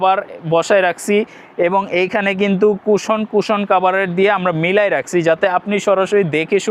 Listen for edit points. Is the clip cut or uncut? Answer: uncut